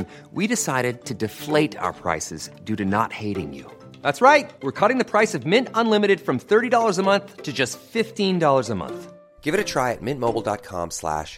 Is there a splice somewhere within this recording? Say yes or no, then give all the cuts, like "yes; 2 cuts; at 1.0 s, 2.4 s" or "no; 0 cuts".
no; 0 cuts